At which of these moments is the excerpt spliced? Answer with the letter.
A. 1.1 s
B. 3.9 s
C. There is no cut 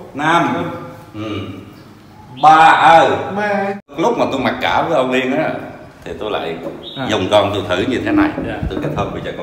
B